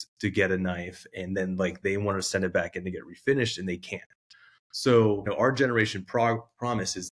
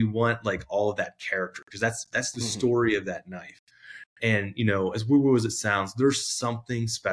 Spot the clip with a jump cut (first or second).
first